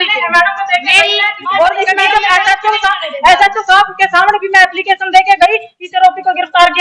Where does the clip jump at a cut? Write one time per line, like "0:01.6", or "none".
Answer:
0:01.9